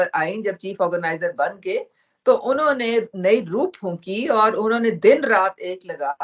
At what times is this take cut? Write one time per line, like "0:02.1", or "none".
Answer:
none